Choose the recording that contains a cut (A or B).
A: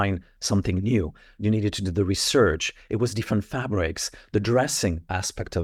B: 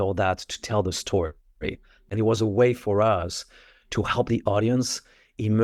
B